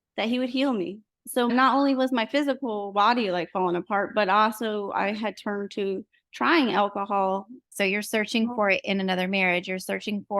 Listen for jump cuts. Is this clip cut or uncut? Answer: cut